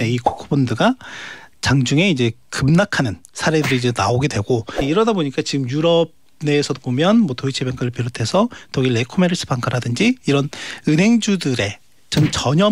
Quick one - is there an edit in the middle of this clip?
yes; 1 cut; at 4.7 s

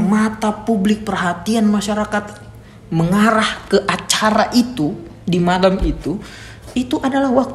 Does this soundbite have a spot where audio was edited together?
no; 0 cuts

